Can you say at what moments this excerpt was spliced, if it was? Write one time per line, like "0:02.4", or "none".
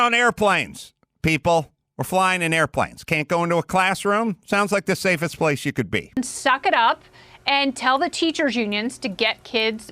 0:02.0
0:06.1